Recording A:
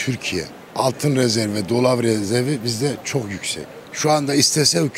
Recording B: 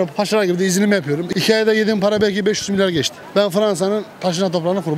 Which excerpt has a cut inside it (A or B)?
B